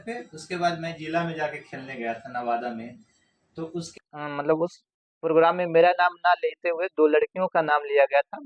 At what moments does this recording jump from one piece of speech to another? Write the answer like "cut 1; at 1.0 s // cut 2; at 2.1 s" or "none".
cut 1; at 4.0 s